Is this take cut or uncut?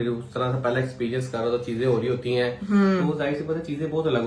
uncut